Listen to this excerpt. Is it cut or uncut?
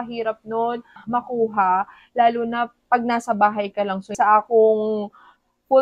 cut